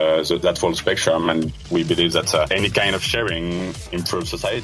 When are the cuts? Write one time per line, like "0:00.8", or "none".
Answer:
0:02.5
0:03.7